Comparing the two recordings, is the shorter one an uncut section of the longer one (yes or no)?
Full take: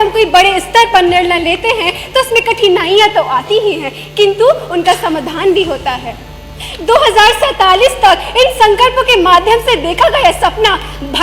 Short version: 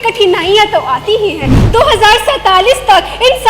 no